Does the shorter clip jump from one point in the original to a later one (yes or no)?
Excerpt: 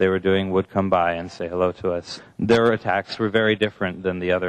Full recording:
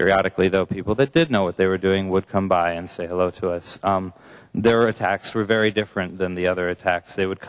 yes